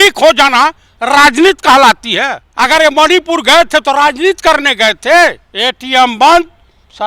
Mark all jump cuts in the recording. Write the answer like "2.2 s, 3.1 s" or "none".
2.4 s, 5.5 s